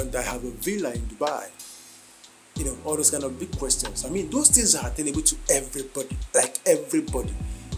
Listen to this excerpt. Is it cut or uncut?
uncut